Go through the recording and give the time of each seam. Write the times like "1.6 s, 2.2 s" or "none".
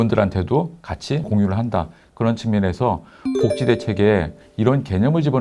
1.3 s, 4.4 s